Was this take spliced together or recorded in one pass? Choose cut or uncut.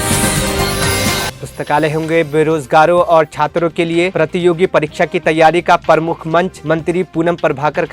cut